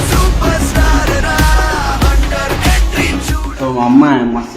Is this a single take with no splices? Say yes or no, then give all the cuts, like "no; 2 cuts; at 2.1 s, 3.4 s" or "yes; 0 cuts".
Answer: no; 1 cut; at 3.5 s